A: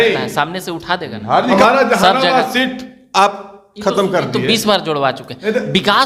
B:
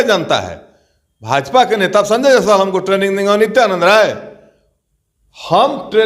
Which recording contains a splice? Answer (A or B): A